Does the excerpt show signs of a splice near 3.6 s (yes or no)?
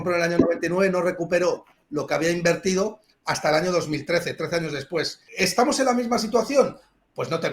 no